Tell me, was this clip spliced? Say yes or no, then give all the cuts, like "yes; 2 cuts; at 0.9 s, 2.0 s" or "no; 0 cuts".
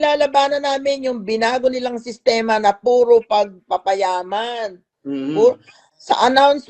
no; 0 cuts